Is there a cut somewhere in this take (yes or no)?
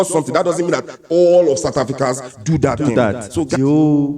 yes